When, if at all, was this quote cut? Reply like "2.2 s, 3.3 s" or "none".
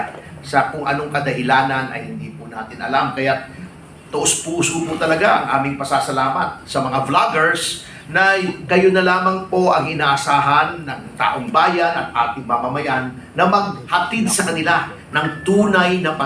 none